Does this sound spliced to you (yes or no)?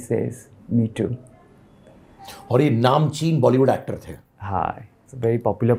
no